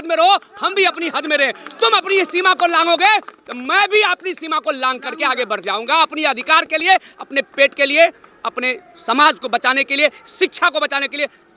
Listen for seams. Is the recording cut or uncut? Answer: uncut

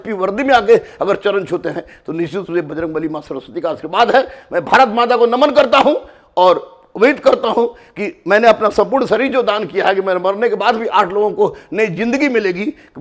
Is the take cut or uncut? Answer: cut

